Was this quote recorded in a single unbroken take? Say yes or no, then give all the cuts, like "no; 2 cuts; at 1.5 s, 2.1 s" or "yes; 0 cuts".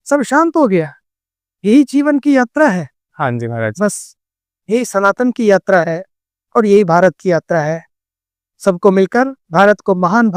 yes; 0 cuts